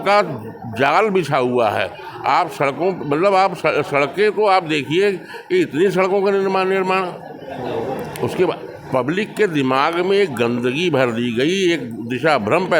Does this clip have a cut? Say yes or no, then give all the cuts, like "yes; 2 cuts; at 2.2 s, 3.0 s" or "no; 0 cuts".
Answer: no; 0 cuts